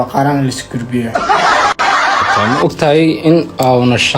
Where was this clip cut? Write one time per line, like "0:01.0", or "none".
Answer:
0:01.1
0:02.6